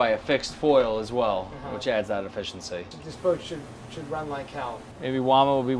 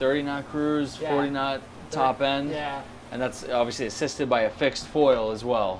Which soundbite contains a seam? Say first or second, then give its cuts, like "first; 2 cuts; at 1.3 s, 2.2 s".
first; 2 cuts; at 2.9 s, 4.9 s